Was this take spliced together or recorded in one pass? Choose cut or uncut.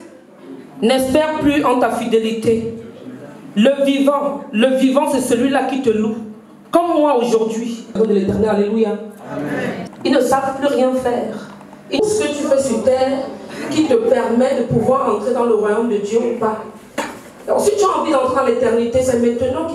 uncut